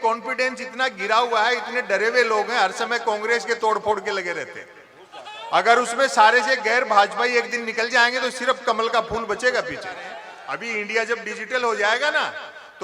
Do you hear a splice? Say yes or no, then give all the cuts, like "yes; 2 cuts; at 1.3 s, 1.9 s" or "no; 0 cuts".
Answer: yes; 1 cut; at 10.3 s